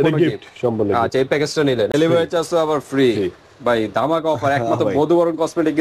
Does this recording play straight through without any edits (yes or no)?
no